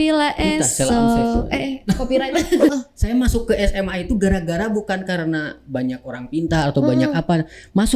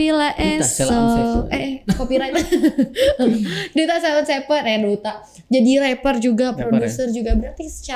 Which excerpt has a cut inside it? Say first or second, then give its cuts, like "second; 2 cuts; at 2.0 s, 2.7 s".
first; 1 cut; at 2.7 s